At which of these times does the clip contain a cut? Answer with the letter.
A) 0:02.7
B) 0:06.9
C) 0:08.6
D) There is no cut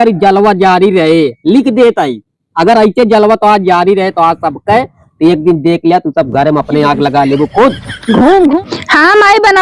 C